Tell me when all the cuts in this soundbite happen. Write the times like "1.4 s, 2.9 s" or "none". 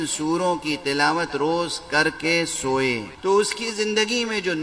3.1 s

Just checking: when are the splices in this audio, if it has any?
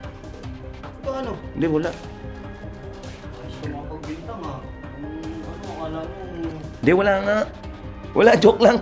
1.4 s

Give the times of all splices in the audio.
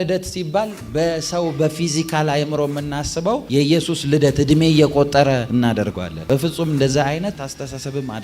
7.3 s

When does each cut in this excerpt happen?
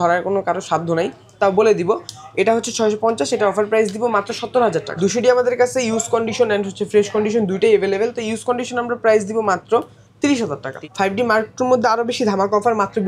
4.9 s, 10.2 s

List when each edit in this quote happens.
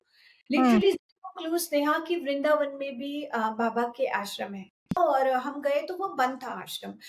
5.0 s

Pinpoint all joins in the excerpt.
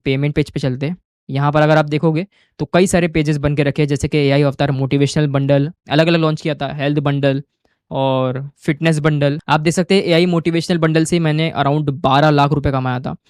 none

